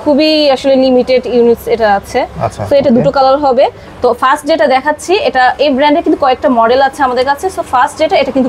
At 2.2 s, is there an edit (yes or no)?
no